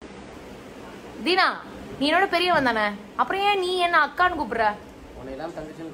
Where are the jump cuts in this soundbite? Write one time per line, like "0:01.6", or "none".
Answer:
0:03.7